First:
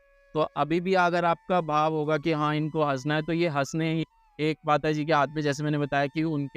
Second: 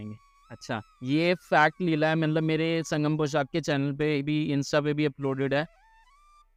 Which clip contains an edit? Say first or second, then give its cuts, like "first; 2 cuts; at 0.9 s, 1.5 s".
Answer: first; 1 cut; at 4.0 s